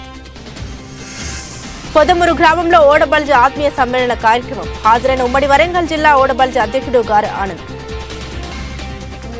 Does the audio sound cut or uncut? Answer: cut